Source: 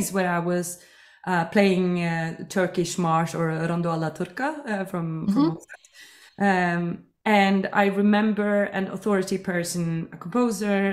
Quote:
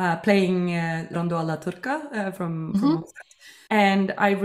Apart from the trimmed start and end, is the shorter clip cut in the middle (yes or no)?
yes